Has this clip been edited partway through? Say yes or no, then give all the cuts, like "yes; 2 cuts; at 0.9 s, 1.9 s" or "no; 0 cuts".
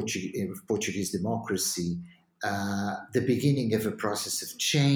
no; 0 cuts